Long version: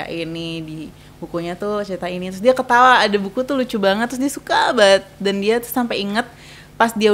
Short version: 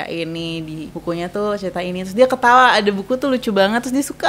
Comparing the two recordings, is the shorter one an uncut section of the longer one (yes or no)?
no